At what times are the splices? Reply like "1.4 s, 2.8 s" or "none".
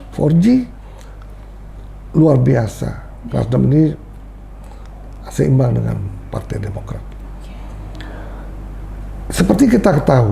none